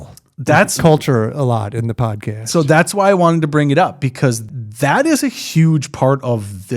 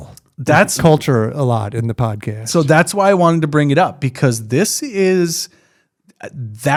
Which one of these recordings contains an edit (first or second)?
first